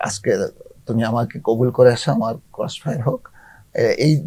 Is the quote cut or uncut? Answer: uncut